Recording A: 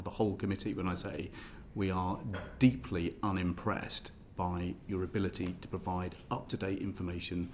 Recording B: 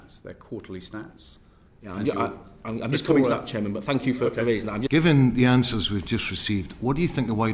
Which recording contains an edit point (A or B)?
B